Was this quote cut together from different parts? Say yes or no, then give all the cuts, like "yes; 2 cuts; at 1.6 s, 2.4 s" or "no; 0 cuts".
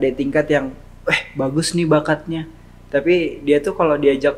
no; 0 cuts